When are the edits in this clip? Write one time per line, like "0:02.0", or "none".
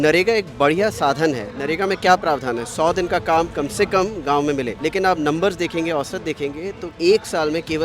0:01.5
0:04.7
0:06.9